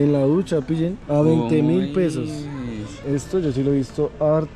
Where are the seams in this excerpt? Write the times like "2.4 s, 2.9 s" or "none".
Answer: 3.0 s